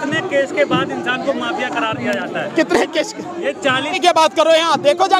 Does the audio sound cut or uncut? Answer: cut